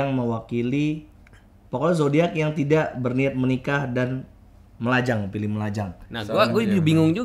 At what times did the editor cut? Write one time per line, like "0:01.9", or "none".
0:05.9